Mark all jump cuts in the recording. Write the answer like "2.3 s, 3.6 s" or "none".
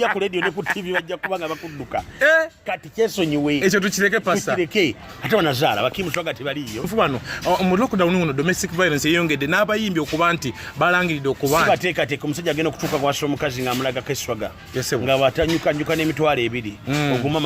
6.9 s